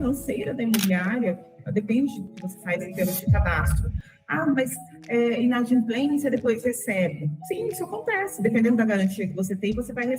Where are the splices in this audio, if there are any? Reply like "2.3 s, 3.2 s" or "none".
2.3 s, 7.4 s